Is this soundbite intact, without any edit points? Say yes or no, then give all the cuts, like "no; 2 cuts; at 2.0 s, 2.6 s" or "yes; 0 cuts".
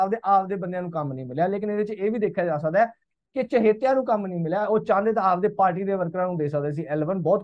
yes; 0 cuts